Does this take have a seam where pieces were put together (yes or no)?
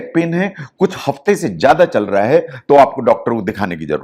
no